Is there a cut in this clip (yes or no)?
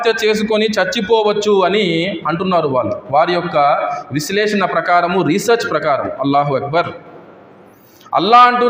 no